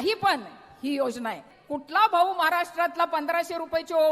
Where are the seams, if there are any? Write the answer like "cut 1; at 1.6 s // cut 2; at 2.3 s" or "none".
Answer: cut 1; at 1.5 s